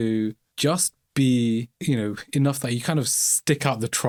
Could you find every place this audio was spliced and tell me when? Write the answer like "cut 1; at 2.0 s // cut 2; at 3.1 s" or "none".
none